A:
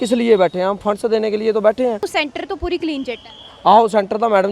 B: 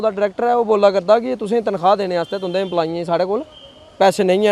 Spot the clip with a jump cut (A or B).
A